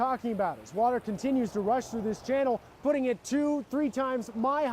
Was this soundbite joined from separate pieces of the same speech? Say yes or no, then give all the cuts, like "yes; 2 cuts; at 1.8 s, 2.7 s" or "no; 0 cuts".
no; 0 cuts